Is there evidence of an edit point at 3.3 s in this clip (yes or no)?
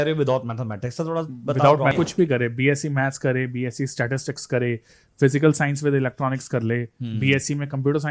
no